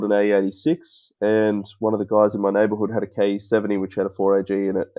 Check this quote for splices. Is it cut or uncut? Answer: uncut